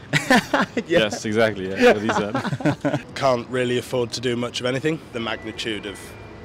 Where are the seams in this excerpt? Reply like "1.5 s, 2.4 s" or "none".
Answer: 3.1 s, 5.1 s